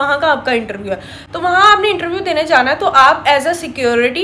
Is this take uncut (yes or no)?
yes